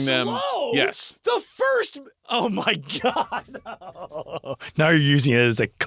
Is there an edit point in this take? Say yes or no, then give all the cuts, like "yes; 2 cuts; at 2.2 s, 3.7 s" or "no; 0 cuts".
no; 0 cuts